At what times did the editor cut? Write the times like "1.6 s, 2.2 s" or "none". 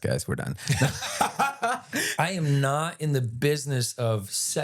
2.0 s